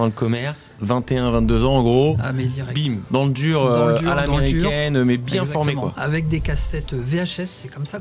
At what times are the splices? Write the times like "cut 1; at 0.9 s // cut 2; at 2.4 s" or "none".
none

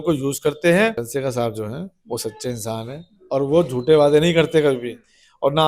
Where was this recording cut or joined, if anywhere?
cut 1; at 1.0 s

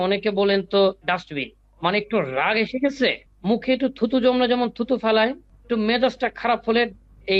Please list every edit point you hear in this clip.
cut 1; at 1.6 s // cut 2; at 3.3 s // cut 3; at 5.5 s

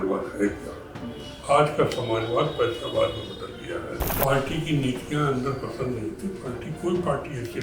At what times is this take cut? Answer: cut 1; at 4.0 s

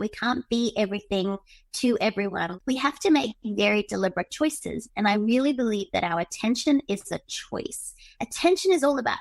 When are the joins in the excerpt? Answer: cut 1; at 2.5 s

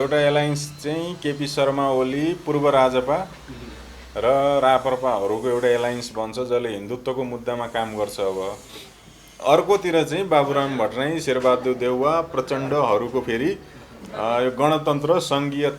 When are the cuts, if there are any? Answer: cut 1; at 8.6 s

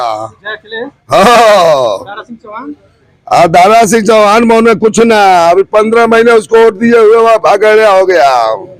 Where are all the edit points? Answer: none

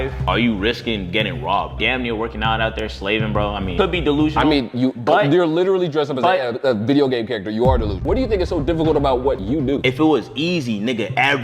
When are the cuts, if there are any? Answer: none

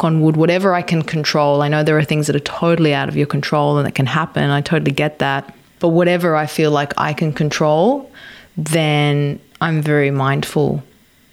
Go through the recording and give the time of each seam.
cut 1; at 5.6 s

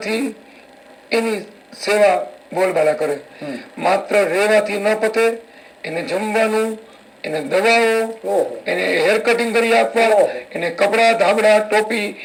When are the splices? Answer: none

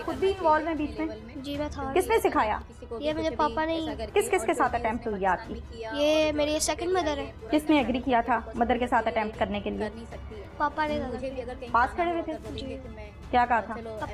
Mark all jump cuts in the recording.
cut 1; at 4.1 s // cut 2; at 7.3 s

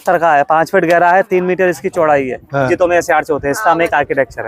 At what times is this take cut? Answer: cut 1; at 2.7 s

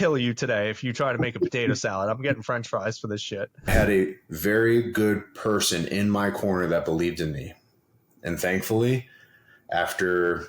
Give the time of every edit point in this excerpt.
cut 1; at 3.7 s

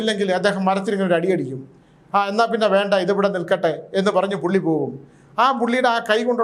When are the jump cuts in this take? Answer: none

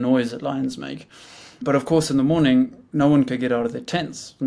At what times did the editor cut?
cut 1; at 1.6 s // cut 2; at 2.8 s

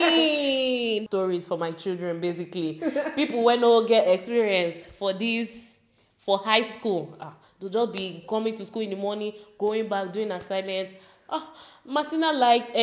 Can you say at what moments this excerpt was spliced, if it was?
cut 1; at 1.1 s

